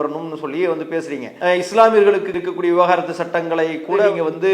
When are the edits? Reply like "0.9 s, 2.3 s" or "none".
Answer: 1.3 s